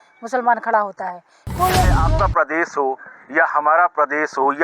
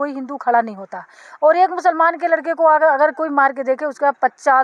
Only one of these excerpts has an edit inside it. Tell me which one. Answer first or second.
first